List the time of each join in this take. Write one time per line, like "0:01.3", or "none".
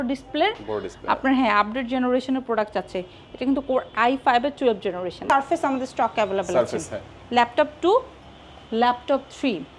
0:05.3